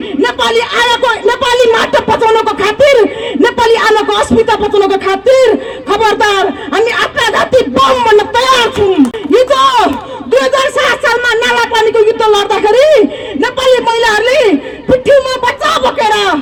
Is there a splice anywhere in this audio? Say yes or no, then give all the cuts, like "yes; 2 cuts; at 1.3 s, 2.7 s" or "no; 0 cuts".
no; 0 cuts